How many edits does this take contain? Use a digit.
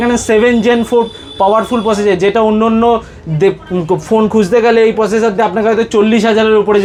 0